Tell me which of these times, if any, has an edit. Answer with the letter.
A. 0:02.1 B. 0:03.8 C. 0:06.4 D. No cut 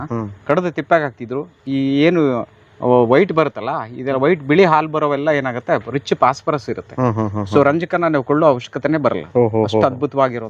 D